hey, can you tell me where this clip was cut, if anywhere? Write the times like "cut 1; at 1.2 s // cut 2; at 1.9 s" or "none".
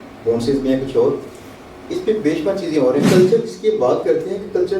cut 1; at 3.1 s